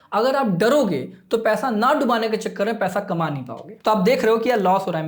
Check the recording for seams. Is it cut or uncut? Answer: cut